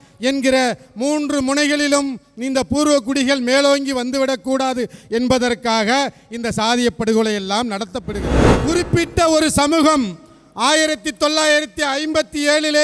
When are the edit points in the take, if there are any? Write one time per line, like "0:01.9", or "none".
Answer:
0:08.5